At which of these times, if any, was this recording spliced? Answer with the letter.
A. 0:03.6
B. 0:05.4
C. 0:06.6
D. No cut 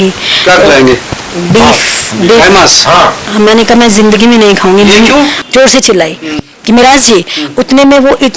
B